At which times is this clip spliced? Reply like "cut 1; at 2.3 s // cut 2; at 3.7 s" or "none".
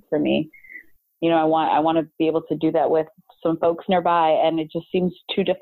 none